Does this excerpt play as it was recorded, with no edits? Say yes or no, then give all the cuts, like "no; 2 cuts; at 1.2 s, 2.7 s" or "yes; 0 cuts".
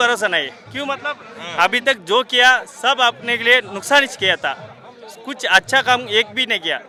yes; 0 cuts